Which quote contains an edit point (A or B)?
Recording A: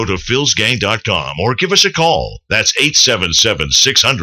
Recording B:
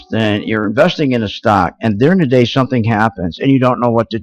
A